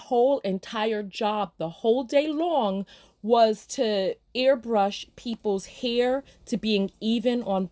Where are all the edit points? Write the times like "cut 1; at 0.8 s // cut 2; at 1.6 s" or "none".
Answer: none